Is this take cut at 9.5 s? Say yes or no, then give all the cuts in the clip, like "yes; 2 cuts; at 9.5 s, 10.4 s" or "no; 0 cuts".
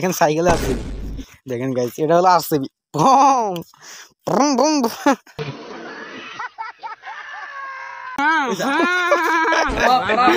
no; 1 cut; at 8.2 s